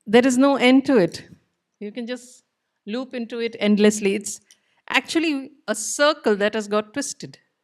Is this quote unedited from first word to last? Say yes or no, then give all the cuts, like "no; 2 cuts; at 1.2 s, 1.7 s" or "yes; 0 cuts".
yes; 0 cuts